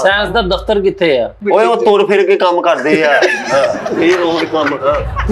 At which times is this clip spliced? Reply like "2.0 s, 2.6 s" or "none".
1.4 s